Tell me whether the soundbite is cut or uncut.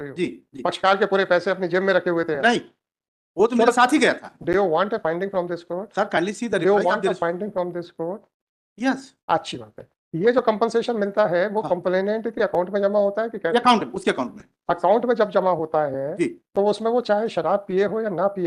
uncut